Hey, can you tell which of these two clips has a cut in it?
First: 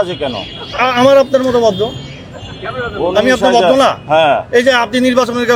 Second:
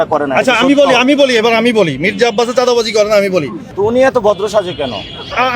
second; 1 cut; at 3.6 s

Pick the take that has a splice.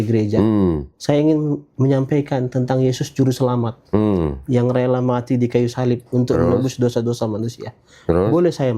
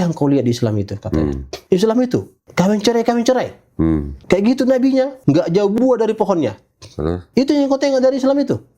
second; 5 cuts; at 1.5 s, 2.4 s, 4.1 s, 5.2 s, 7.2 s

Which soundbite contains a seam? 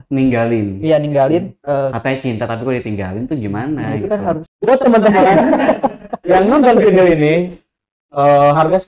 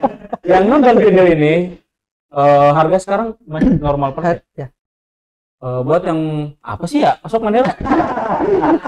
first; 1 cut; at 4.5 s

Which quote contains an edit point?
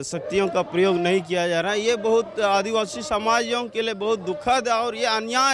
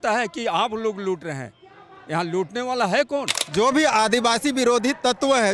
second; 1 cut; at 3.4 s

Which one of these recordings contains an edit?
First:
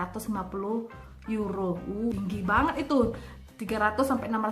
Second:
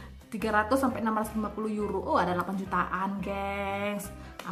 first; 1 cut; at 2.1 s

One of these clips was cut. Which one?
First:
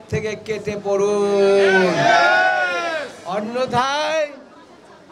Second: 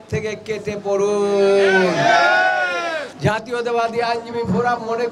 second; 1 cut; at 3.1 s

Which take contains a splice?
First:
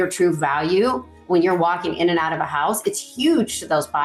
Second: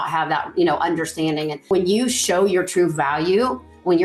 second; 1 cut; at 1.6 s

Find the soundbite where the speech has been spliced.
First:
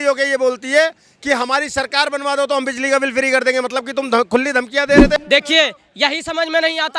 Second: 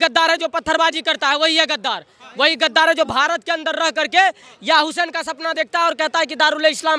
first; 1 cut; at 5.2 s

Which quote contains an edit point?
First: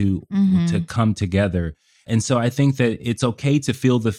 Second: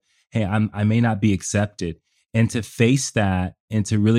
first; 1 cut; at 2.0 s

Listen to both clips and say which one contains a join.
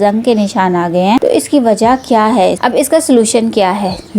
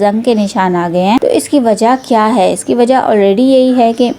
first; 1 cut; at 2.6 s

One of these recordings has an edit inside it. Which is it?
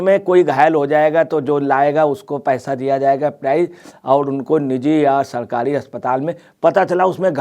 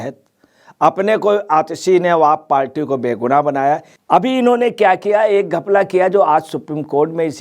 second; 1 cut; at 3.9 s

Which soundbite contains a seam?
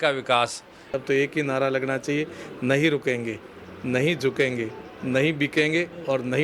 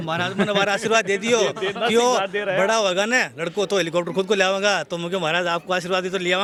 first; 1 cut; at 1.0 s

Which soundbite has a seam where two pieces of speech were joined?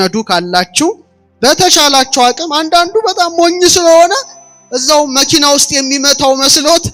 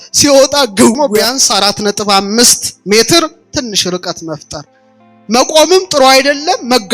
second; 1 cut; at 1.0 s

